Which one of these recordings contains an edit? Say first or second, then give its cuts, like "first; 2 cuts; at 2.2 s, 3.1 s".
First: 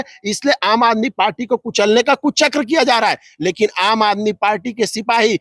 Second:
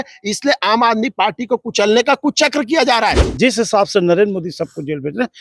second; 1 cut; at 3.3 s